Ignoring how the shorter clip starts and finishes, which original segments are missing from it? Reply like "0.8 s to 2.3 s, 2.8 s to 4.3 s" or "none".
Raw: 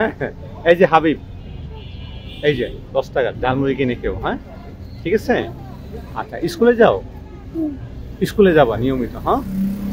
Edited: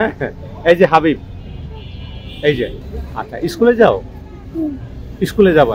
2.8 s to 5.8 s